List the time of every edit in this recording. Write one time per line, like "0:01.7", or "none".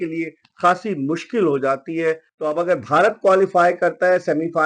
0:02.3